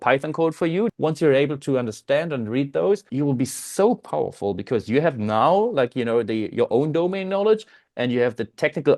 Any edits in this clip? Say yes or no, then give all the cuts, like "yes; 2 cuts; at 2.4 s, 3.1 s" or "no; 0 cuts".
yes; 2 cuts; at 0.9 s, 3.1 s